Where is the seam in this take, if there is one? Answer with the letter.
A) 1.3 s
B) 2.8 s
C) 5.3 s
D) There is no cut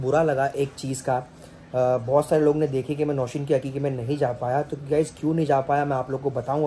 D